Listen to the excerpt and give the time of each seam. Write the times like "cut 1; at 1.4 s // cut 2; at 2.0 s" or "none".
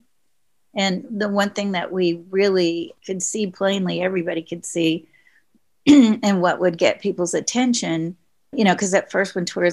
none